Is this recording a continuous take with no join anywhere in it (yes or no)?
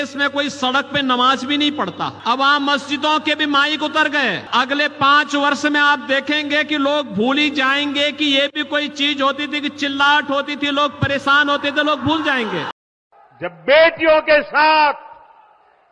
no